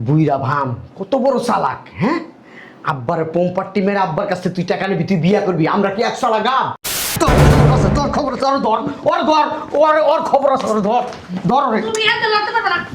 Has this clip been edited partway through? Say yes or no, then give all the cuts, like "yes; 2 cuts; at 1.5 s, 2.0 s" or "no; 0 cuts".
yes; 1 cut; at 7.0 s